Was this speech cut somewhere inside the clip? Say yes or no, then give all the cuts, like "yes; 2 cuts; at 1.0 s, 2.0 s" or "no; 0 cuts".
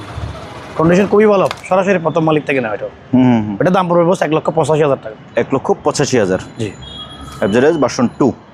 no; 0 cuts